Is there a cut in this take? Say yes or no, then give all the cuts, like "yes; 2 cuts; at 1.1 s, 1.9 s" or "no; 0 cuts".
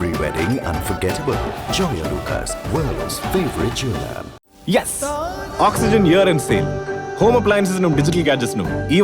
yes; 1 cut; at 4.4 s